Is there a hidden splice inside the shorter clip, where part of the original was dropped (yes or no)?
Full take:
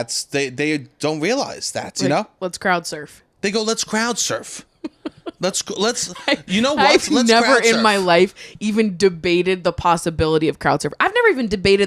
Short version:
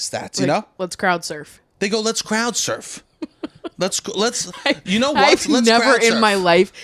no